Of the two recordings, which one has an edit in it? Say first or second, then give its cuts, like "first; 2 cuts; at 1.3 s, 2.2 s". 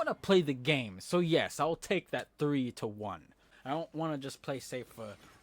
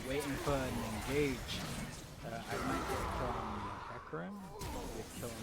first; 1 cut; at 3.4 s